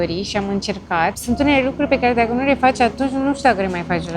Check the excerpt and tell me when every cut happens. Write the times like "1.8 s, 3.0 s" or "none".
1.2 s